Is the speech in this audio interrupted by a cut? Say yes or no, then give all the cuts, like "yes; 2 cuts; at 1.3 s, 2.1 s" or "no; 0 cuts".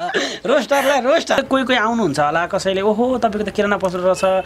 yes; 1 cut; at 1.4 s